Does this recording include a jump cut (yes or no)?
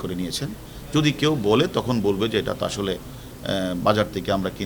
no